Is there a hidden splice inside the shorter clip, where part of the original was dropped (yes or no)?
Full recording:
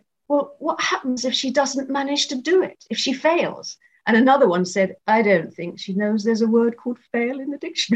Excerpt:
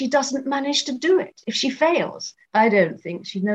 yes